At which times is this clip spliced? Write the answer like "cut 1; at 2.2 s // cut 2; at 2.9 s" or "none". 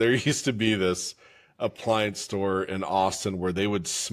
none

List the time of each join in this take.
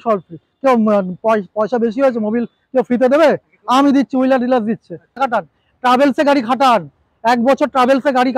cut 1; at 5.2 s

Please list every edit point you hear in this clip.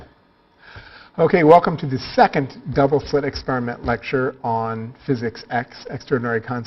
cut 1; at 2.5 s

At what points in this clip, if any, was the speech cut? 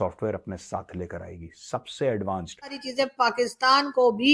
cut 1; at 2.8 s

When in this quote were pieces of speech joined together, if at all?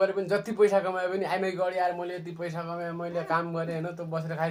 none

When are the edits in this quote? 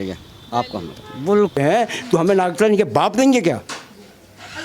cut 1; at 1.6 s

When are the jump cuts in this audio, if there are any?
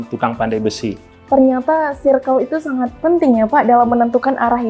cut 1; at 1.1 s

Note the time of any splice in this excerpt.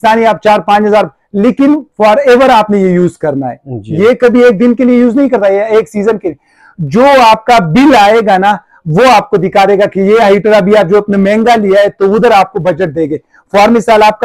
none

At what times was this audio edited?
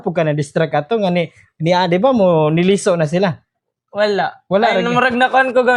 none

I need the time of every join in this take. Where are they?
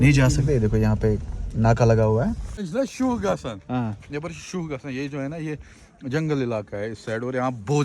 cut 1; at 2.7 s

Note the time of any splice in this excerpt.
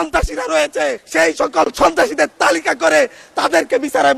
cut 1; at 1.0 s

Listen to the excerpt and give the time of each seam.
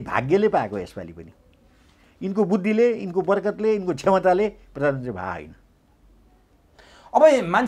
none

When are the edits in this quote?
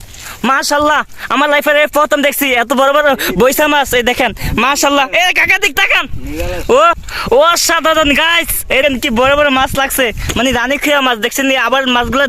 cut 1; at 7.1 s // cut 2; at 8.8 s

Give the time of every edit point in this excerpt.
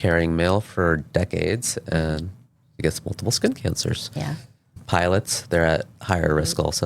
cut 1; at 4.7 s

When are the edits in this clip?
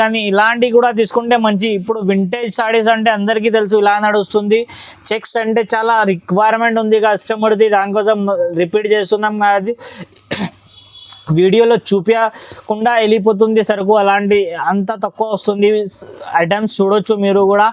none

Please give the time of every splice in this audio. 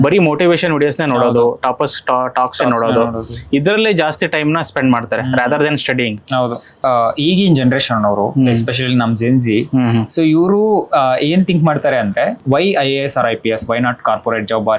cut 1; at 6.8 s // cut 2; at 12.4 s

